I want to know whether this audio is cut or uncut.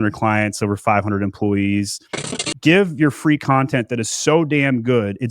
cut